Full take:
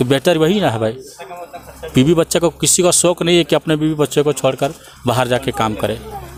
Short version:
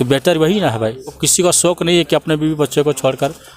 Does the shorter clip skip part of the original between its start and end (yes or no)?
yes